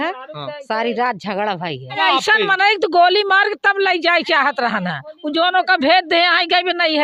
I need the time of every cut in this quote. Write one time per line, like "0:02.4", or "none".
0:02.0